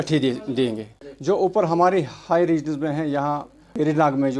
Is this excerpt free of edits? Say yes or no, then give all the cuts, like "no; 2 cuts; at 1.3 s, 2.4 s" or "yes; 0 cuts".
yes; 0 cuts